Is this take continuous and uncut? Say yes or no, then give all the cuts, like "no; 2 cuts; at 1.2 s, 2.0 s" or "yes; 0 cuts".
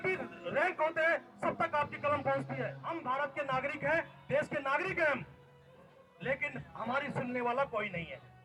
no; 1 cut; at 2.8 s